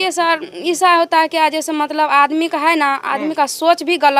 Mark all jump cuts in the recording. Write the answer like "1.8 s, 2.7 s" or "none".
none